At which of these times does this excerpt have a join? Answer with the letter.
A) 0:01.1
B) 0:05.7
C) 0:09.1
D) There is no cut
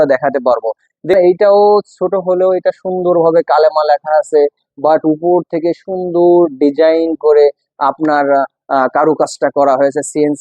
A